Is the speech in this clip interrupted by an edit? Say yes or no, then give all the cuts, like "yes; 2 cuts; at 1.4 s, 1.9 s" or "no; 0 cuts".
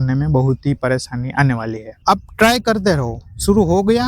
yes; 1 cut; at 1.9 s